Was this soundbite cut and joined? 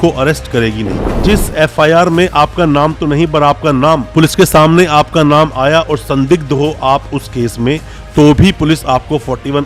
yes; 1 cut; at 1.2 s

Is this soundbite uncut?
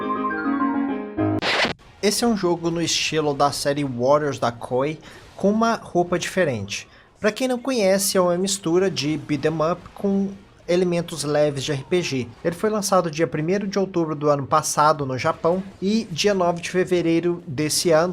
no; 2 cuts; at 1.7 s, 14.7 s

